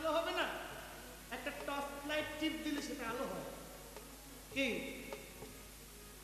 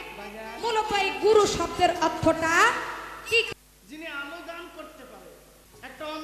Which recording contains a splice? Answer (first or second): second